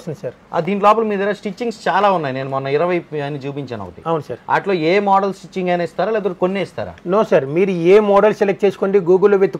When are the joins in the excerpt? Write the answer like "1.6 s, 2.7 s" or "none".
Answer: none